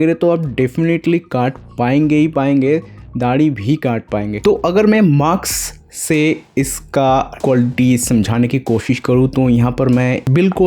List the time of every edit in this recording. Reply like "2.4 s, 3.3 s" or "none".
4.3 s